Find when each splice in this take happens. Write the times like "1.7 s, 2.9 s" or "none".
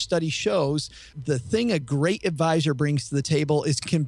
1.1 s, 3.3 s